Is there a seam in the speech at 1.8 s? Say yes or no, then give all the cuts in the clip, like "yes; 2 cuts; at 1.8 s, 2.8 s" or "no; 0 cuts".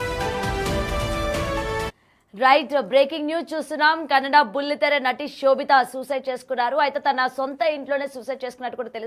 yes; 1 cut; at 1.8 s